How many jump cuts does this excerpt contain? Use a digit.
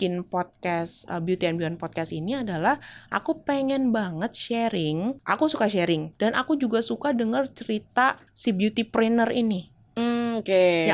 3